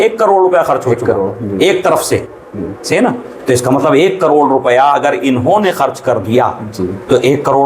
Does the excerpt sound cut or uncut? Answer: uncut